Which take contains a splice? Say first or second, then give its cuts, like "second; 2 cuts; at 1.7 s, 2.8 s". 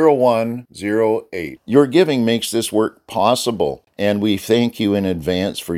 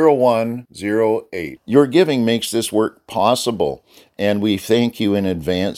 first; 1 cut; at 3.8 s